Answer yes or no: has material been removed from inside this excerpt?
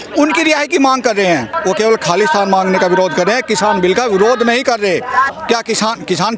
yes